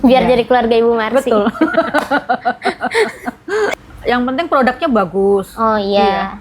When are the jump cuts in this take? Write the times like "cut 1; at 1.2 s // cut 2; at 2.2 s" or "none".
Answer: cut 1; at 3.7 s